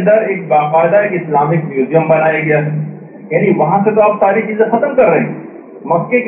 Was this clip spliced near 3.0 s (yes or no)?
no